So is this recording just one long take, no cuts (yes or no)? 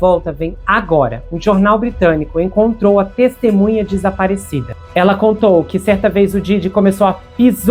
no